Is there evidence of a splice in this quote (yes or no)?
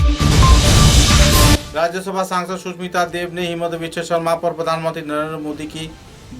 yes